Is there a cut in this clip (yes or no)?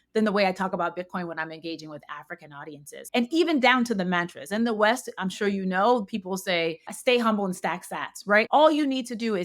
yes